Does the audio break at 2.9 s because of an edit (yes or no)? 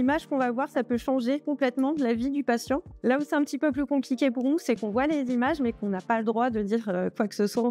no